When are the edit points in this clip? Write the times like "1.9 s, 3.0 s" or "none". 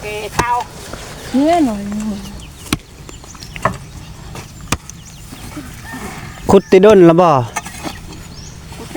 none